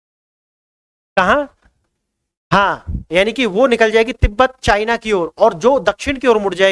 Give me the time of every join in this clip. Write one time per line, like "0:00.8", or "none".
none